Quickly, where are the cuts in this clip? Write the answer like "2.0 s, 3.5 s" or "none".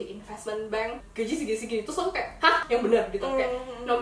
1.0 s, 2.6 s